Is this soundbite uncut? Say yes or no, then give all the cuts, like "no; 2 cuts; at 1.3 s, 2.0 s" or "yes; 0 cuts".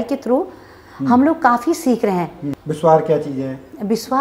no; 1 cut; at 2.5 s